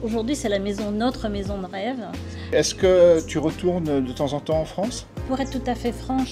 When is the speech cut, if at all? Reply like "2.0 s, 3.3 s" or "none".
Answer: 2.5 s, 5.2 s